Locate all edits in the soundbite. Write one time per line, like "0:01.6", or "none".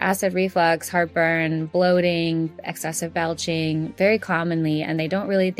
none